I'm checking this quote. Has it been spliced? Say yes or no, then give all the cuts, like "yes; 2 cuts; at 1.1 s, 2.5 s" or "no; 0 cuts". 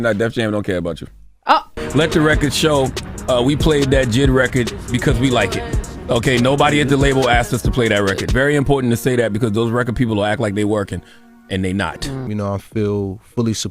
yes; 2 cuts; at 1.8 s, 12.3 s